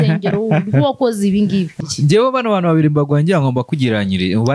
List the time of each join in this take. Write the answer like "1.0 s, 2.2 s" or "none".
1.8 s